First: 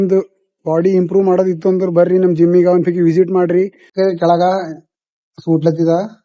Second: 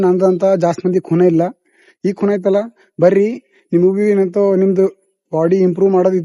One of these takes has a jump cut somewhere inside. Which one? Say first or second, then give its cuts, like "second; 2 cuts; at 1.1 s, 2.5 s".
first; 1 cut; at 3.8 s